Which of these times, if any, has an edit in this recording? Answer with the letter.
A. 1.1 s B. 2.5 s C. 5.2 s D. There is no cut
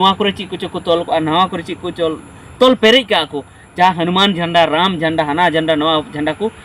D